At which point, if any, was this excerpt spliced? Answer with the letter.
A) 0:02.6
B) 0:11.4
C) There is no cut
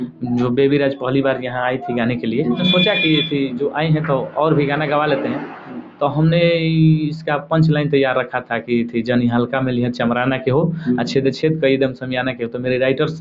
A